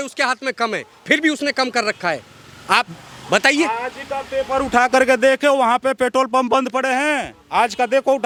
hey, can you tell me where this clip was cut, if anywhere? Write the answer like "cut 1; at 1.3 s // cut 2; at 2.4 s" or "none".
none